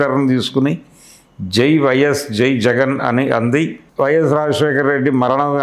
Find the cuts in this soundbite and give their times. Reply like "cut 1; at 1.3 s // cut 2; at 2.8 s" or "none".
cut 1; at 3.8 s